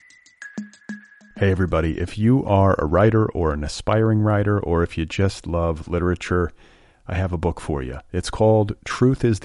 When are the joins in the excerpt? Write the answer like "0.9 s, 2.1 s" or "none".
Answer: 0.9 s

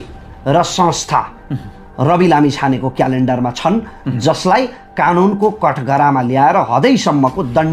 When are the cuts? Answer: none

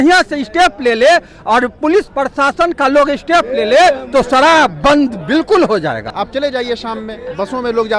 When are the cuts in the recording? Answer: 6.1 s

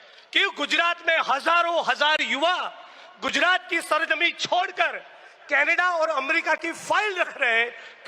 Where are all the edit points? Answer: none

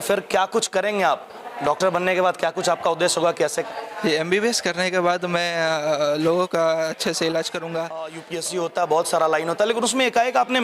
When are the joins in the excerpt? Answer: 3.6 s, 8.3 s

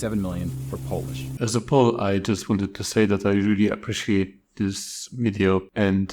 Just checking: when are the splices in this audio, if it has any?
1.3 s

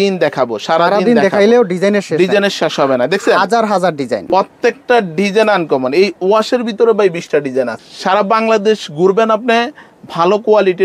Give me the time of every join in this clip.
4.3 s, 7.8 s

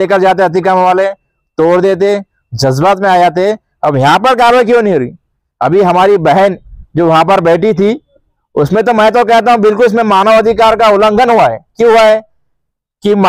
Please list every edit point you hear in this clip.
none

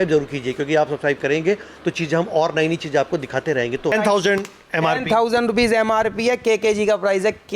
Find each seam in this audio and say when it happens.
3.9 s

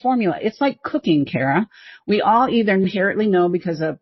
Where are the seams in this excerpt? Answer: 2.8 s

